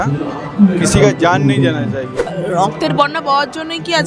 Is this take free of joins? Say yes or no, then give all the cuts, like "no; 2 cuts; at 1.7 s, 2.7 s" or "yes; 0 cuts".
no; 1 cut; at 2.3 s